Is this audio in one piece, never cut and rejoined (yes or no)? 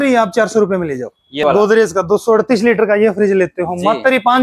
no